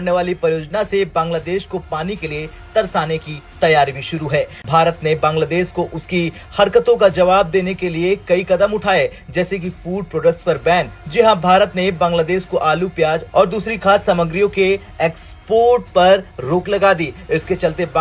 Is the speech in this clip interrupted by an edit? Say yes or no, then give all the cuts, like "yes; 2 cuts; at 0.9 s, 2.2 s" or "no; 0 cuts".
no; 0 cuts